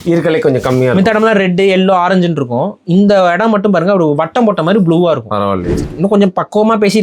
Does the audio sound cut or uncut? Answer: cut